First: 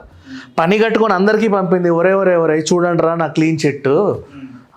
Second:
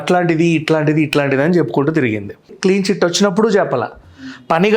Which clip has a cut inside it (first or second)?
second